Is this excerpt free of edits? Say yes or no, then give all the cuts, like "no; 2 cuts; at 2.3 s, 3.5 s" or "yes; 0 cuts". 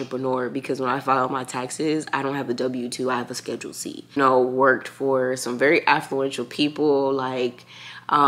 no; 1 cut; at 4.2 s